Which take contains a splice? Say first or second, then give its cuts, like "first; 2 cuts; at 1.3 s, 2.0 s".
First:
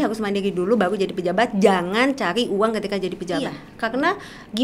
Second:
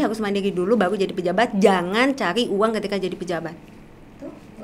first; 1 cut; at 3.7 s